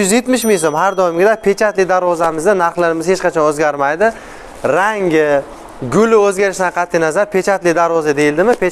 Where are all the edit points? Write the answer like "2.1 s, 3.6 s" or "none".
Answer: none